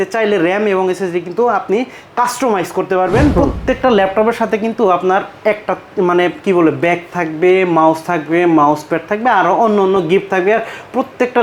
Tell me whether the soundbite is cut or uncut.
cut